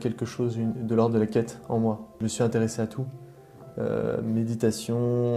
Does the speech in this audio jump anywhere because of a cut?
yes; 1 cut; at 2.2 s

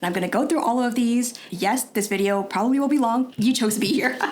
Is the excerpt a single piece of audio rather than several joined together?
no; 1 cut; at 3.3 s

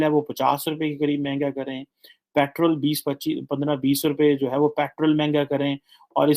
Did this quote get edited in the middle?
no; 0 cuts

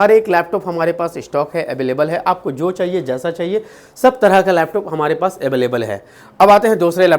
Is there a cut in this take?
no; 0 cuts

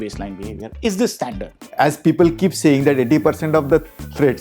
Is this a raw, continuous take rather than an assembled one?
no; 1 cut; at 1.7 s

